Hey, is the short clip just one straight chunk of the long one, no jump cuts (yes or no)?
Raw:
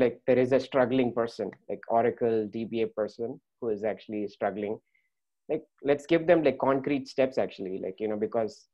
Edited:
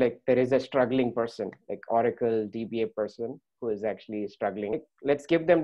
no